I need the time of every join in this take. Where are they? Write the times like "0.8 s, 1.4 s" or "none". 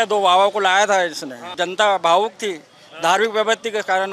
1.5 s